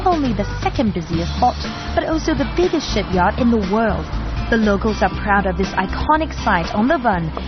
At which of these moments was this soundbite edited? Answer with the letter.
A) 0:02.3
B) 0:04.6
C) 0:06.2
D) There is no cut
A